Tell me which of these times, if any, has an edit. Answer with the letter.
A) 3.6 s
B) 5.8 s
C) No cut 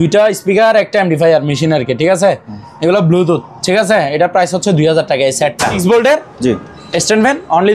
B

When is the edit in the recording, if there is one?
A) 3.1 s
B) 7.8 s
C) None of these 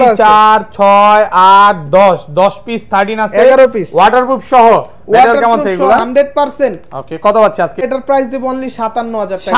B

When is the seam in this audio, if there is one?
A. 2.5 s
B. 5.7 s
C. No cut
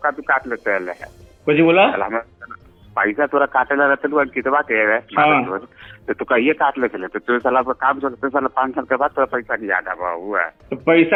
C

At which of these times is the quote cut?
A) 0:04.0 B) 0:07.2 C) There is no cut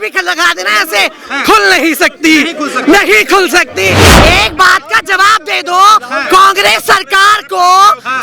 A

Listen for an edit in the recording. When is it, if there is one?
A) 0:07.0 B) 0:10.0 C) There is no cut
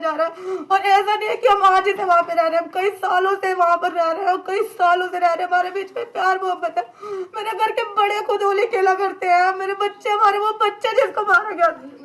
C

